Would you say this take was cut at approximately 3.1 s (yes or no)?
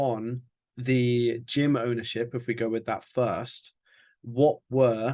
no